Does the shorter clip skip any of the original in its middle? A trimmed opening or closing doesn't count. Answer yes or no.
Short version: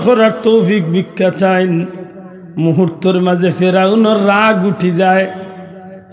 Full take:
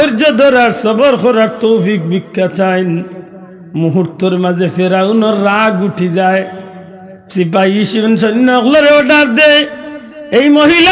no